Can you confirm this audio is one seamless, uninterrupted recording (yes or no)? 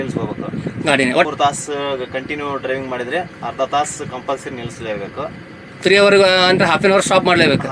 no